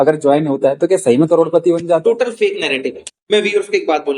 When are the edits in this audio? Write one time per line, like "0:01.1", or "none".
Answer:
0:03.1

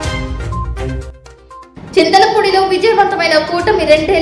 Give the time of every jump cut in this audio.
0:01.0

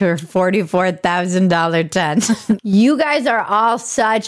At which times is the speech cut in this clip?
0:02.6

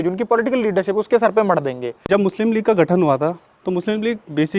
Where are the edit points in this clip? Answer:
0:02.1

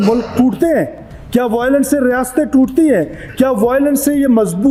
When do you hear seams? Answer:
none

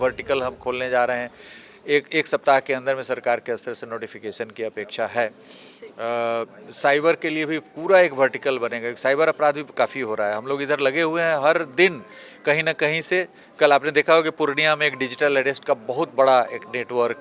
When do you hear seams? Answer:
none

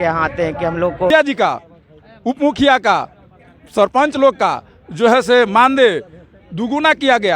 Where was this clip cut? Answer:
0:01.1

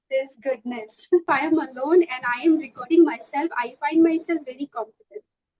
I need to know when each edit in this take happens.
0:01.3

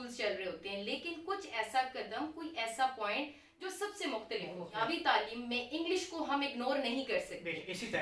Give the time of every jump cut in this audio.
0:04.8

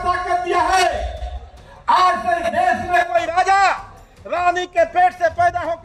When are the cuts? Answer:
none

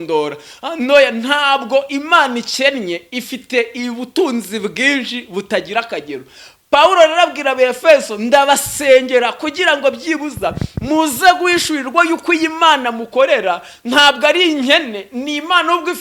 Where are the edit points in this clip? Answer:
none

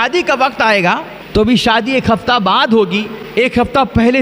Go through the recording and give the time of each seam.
0:01.1
0:03.2

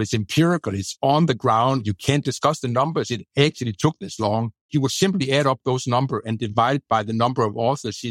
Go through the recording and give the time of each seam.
0:04.6

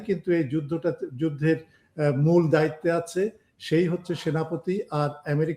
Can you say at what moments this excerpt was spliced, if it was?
none

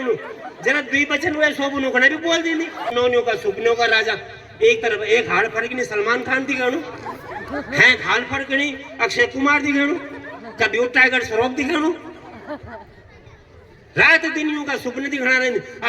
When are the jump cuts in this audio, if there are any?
0:02.9

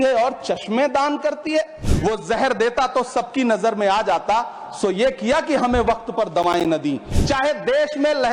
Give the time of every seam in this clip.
0:01.8
0:07.1

